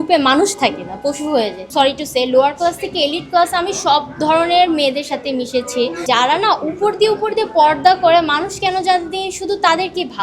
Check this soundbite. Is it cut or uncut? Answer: cut